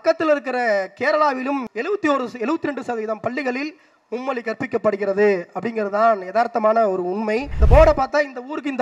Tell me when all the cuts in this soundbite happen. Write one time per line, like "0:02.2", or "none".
0:01.6
0:07.5